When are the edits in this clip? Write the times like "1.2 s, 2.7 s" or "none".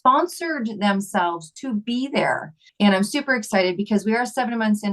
2.6 s